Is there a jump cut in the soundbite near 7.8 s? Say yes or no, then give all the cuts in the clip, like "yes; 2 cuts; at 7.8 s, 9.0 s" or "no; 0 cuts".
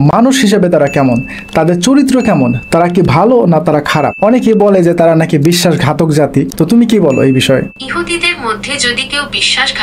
yes; 3 cuts; at 4.1 s, 6.5 s, 7.8 s